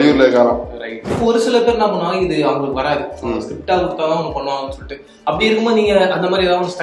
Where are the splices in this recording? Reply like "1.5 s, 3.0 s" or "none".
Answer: 1.1 s